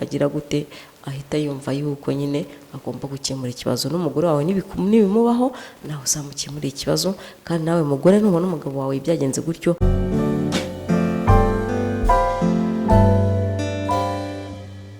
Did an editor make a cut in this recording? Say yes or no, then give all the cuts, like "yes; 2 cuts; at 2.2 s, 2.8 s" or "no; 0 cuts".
yes; 1 cut; at 9.8 s